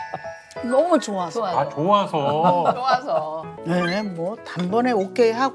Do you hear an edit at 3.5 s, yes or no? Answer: yes